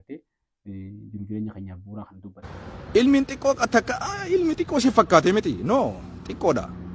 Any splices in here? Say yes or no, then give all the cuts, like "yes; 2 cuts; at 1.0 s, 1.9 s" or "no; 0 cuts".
yes; 1 cut; at 2.4 s